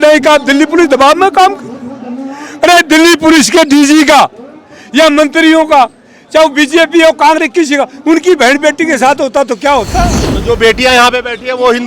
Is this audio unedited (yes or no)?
no